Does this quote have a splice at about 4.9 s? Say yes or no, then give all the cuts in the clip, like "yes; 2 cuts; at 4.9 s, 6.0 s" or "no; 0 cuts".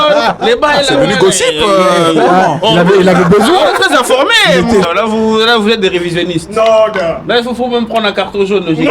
yes; 1 cut; at 4.9 s